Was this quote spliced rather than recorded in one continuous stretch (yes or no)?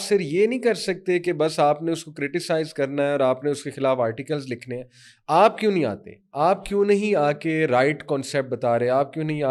no